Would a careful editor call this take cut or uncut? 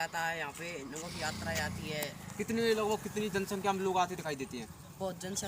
uncut